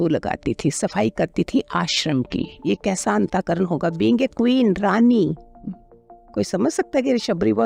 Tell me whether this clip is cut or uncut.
uncut